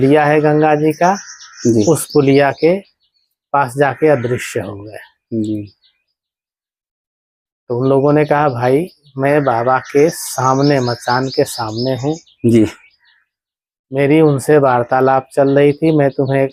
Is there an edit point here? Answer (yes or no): no